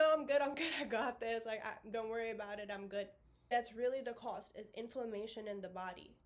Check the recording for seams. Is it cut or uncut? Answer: cut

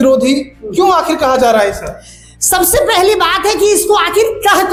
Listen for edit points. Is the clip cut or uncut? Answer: uncut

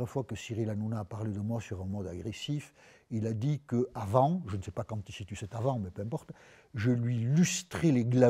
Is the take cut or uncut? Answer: uncut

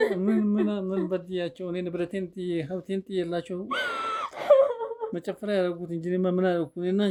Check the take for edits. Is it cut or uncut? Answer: uncut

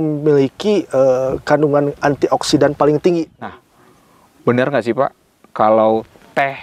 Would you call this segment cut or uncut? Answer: cut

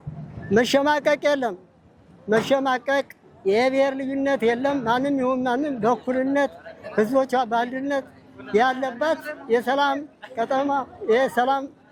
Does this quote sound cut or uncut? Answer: uncut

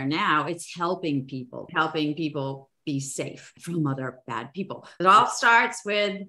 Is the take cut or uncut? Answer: cut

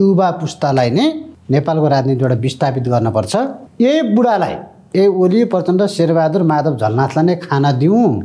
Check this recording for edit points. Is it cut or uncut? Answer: cut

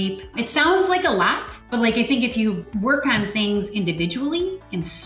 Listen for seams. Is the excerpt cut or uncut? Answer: cut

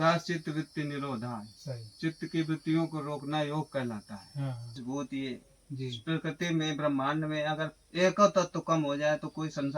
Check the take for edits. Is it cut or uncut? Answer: cut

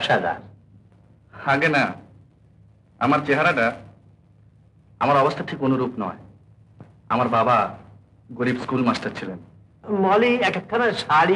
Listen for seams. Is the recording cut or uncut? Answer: cut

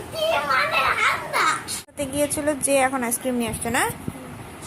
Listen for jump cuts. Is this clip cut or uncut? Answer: cut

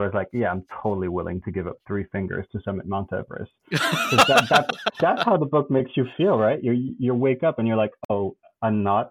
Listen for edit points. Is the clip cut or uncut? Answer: uncut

